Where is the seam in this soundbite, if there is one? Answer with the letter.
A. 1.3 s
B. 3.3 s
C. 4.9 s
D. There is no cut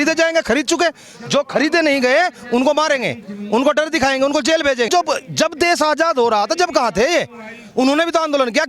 C